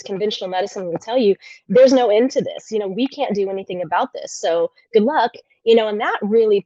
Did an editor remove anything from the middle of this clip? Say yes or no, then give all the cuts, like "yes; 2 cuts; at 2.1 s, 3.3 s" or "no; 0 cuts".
no; 0 cuts